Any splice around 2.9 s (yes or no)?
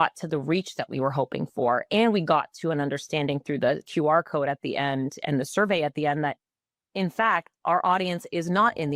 no